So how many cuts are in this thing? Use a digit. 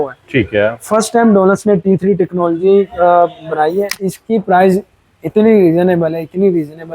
1